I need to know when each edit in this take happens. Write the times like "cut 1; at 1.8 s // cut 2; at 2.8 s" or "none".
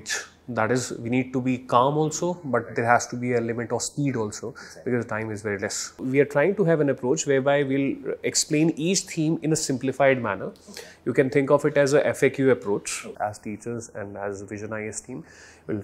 cut 1; at 6.0 s // cut 2; at 13.1 s